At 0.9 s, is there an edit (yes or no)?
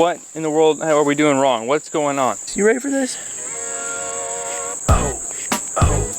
no